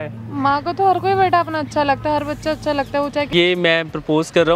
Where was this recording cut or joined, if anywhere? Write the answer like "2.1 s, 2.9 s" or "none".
3.3 s